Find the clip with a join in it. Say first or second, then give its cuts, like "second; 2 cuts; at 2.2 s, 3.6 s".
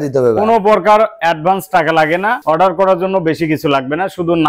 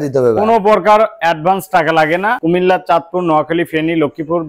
second; 1 cut; at 2.4 s